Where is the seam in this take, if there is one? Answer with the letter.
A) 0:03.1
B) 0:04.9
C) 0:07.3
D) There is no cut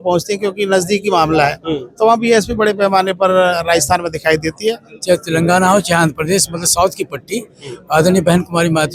B